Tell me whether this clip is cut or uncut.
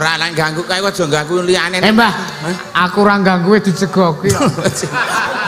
uncut